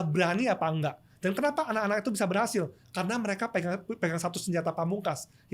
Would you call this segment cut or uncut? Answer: uncut